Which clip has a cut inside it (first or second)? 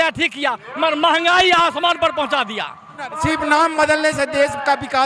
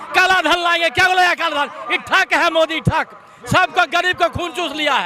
first